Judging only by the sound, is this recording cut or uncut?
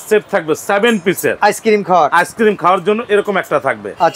uncut